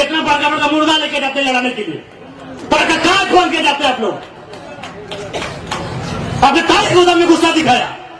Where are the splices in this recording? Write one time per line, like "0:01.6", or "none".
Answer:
none